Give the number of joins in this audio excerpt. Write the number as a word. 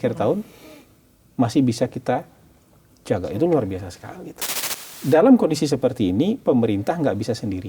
one